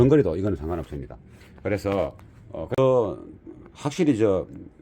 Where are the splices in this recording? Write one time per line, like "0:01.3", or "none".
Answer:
0:02.8